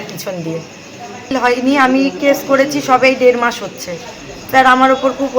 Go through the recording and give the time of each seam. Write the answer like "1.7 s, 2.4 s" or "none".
1.3 s